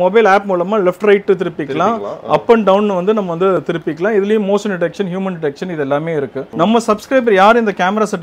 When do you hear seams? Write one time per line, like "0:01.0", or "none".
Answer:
0:06.4